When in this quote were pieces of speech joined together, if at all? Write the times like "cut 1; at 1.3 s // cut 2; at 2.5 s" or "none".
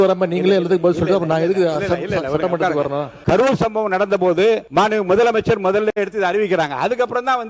cut 1; at 3.1 s // cut 2; at 4.7 s